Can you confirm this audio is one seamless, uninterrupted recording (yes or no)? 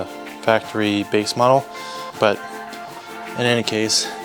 no